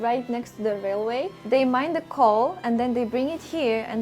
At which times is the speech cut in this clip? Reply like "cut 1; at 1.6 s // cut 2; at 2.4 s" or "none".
cut 1; at 1.4 s